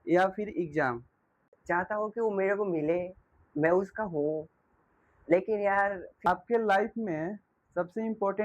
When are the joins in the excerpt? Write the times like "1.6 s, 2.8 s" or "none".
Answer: 1.6 s, 6.3 s